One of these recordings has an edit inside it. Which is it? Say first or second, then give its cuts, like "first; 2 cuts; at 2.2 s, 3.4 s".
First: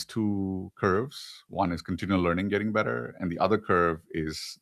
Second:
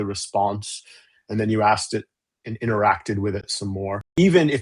second; 1 cut; at 3.5 s